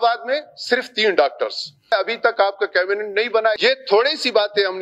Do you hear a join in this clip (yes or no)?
yes